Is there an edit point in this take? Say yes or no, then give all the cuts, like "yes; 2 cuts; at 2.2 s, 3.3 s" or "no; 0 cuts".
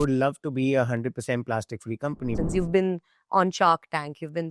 yes; 1 cut; at 2.3 s